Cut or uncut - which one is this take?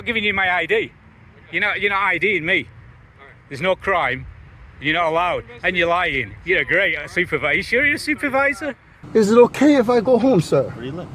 cut